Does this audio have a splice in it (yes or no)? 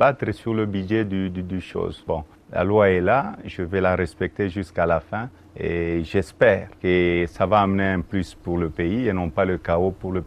yes